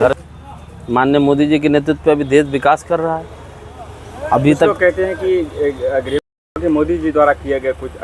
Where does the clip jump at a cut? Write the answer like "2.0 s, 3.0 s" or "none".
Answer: 6.6 s